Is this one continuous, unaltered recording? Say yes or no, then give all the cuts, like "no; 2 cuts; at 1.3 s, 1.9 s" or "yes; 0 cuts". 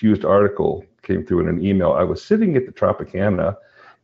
yes; 0 cuts